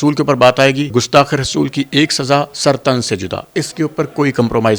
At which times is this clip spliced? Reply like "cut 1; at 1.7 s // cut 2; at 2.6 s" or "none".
cut 1; at 0.9 s